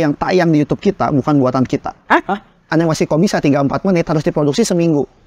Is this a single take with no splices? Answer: no; 1 cut; at 2.7 s

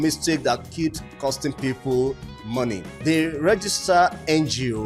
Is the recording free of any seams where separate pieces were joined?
no; 1 cut; at 2.9 s

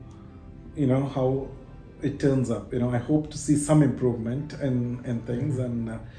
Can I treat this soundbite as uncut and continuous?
yes; 0 cuts

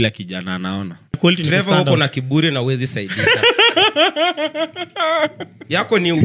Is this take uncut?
no; 1 cut; at 1.2 s

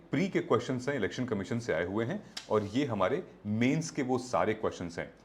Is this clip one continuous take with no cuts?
yes; 0 cuts

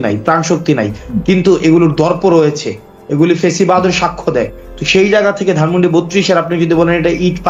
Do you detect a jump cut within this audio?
no; 0 cuts

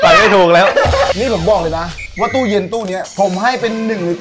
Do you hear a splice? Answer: yes; 2 cuts; at 1.2 s, 2.0 s

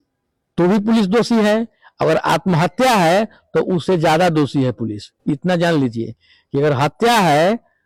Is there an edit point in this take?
no; 0 cuts

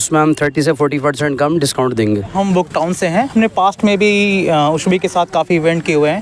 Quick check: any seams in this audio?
yes; 1 cut; at 2.3 s

